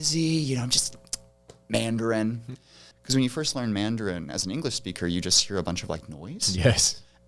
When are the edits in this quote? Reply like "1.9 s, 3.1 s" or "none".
2.9 s